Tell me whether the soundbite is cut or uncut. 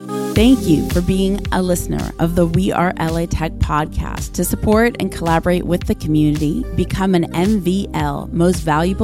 uncut